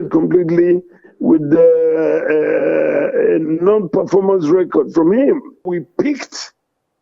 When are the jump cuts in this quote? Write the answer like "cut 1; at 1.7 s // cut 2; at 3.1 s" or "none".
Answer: cut 1; at 5.7 s

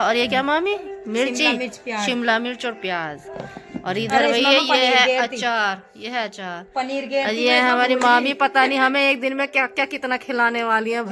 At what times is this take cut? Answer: none

